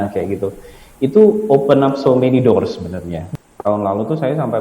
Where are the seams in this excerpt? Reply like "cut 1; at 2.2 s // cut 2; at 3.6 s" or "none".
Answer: cut 1; at 3.2 s